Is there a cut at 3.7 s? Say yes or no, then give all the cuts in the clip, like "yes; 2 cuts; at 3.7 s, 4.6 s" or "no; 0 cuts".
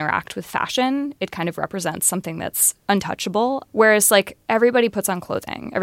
yes; 2 cuts; at 2.7 s, 3.7 s